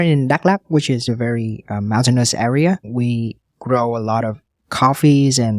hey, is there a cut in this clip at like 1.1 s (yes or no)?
yes